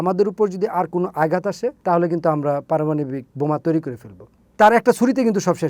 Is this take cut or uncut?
cut